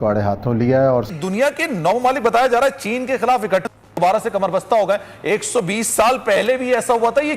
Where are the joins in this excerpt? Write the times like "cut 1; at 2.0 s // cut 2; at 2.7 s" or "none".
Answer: cut 1; at 1.1 s